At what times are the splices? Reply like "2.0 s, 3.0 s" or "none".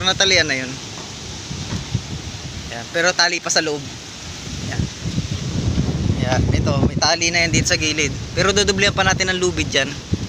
none